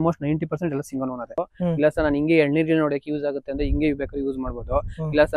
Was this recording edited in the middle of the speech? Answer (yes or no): yes